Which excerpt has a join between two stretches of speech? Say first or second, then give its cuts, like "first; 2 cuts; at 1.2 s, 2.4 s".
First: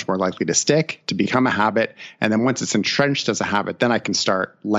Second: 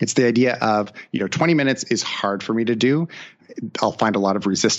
second; 1 cut; at 3.4 s